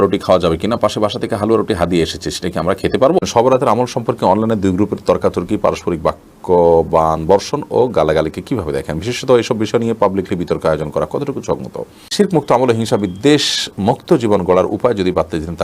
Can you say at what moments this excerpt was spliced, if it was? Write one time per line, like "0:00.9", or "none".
0:03.3
0:12.1